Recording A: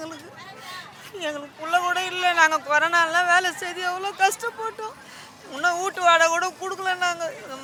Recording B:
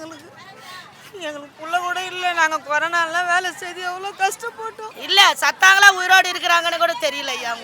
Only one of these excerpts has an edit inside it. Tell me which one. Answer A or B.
B